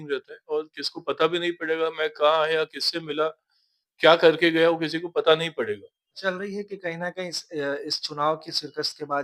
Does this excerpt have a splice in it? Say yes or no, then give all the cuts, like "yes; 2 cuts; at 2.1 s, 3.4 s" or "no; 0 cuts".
yes; 1 cut; at 6.1 s